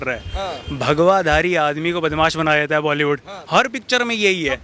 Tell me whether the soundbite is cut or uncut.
uncut